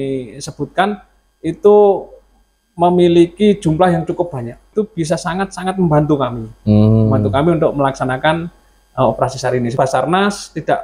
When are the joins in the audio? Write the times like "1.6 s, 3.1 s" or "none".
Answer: 4.6 s, 9.7 s